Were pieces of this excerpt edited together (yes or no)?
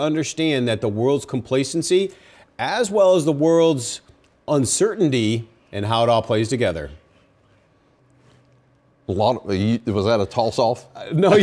yes